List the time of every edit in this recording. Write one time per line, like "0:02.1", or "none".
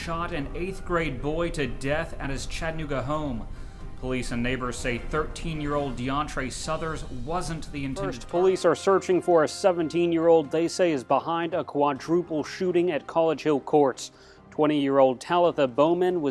0:08.0